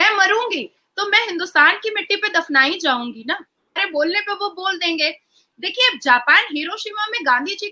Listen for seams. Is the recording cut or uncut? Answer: cut